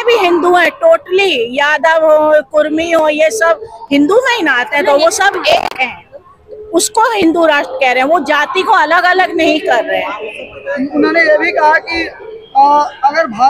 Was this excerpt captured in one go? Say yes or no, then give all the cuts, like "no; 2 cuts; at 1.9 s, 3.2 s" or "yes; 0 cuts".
yes; 0 cuts